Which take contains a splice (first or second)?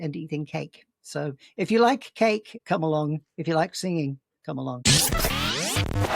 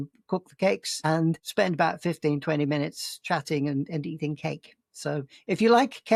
first